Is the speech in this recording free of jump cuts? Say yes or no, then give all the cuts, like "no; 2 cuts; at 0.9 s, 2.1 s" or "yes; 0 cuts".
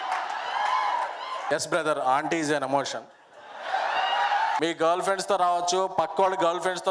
no; 2 cuts; at 1.4 s, 4.6 s